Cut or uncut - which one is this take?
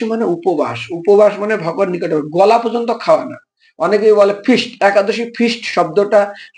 uncut